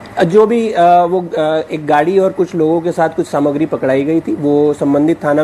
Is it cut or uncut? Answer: uncut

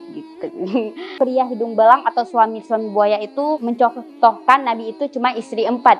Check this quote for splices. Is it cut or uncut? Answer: cut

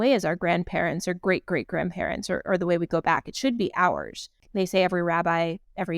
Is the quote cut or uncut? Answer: cut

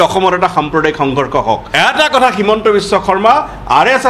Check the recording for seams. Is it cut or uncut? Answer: cut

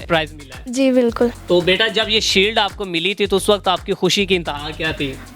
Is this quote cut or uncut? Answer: cut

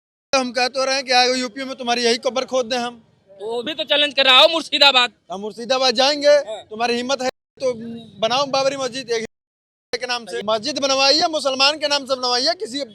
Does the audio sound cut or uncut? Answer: cut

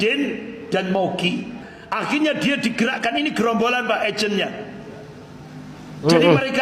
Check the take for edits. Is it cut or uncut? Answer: cut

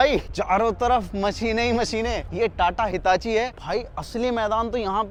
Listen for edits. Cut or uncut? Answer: uncut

